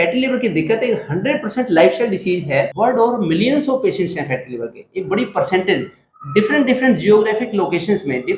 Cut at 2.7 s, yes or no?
yes